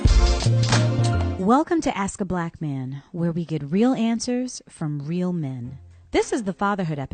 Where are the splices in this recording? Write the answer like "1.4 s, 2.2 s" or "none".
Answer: none